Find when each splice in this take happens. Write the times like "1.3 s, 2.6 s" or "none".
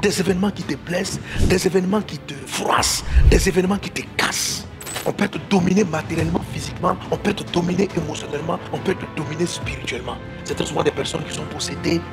4.8 s, 10.4 s